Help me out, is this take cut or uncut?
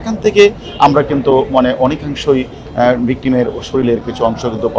uncut